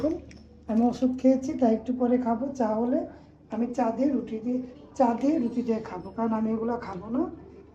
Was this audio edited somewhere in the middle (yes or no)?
no